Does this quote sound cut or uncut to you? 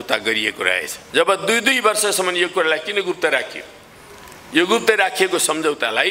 cut